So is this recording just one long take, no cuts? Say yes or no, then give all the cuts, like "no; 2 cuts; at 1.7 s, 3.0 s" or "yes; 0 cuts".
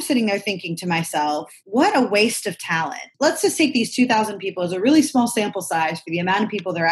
no; 2 cuts; at 1.6 s, 3.1 s